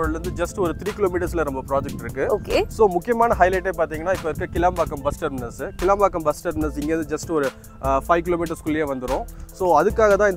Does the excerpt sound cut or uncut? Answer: uncut